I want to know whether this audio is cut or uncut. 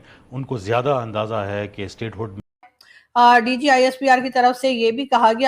cut